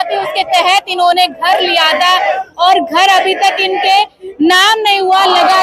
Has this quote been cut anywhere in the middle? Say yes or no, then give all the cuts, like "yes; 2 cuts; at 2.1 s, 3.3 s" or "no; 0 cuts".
no; 0 cuts